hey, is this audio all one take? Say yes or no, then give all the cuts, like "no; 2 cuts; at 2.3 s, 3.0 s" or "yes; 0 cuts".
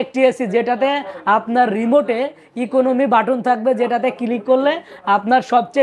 yes; 0 cuts